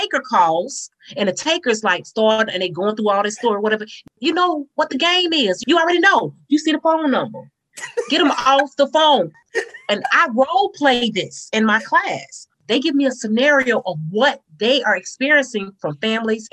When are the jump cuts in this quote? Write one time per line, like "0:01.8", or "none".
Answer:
0:05.6
0:09.4